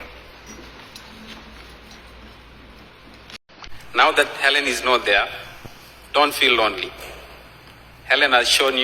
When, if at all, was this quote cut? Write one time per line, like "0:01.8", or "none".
0:03.3

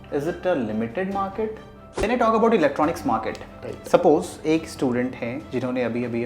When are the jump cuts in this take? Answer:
0:02.1

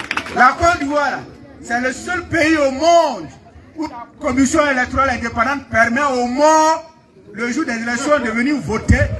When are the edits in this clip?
none

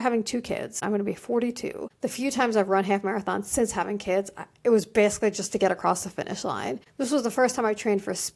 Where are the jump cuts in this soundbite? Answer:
0:00.8
0:01.8
0:06.8

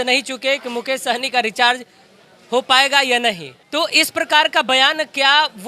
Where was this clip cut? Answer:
0:03.5

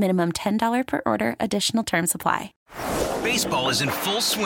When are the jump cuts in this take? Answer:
0:02.5

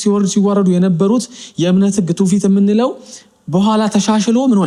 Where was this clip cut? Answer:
none

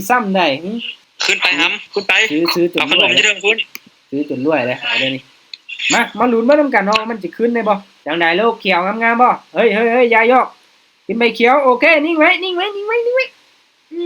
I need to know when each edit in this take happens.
0:01.0
0:07.9

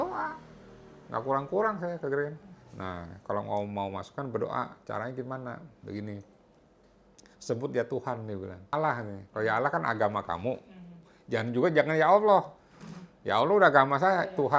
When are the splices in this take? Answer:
0:08.7

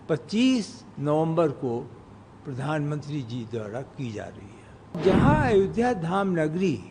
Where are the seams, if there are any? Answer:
0:05.0

